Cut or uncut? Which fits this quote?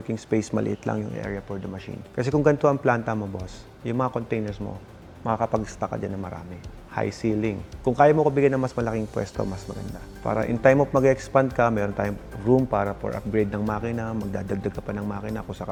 uncut